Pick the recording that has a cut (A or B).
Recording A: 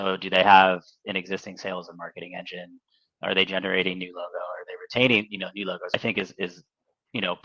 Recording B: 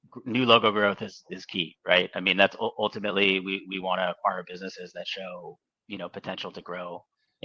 A